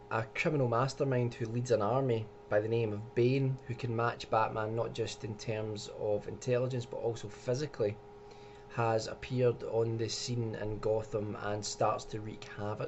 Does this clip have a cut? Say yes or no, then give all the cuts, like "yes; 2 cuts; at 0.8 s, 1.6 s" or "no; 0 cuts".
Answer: no; 0 cuts